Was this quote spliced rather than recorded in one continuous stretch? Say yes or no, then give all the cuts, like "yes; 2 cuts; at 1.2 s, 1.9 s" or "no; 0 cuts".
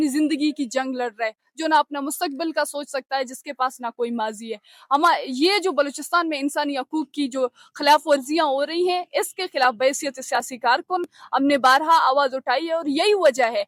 no; 0 cuts